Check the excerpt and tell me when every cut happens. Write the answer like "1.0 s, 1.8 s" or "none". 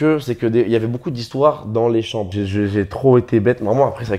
2.4 s